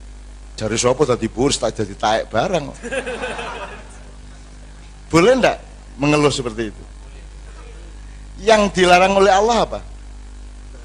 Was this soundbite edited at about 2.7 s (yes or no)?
no